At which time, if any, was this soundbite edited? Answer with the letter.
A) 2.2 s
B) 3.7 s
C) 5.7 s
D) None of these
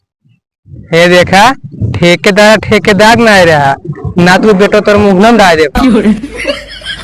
C